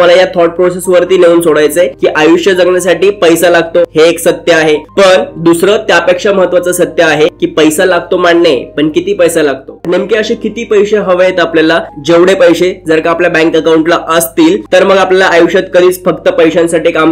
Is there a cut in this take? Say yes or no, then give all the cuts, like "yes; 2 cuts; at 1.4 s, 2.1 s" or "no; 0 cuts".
yes; 4 cuts; at 3.9 s, 4.9 s, 7.4 s, 9.8 s